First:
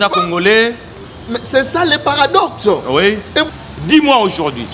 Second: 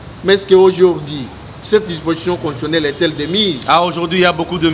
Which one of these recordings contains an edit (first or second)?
first